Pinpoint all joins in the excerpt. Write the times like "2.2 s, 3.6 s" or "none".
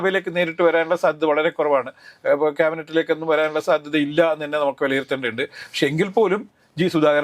none